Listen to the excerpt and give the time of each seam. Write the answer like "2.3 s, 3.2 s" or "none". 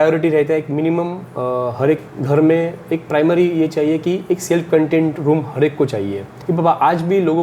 2.1 s, 6.3 s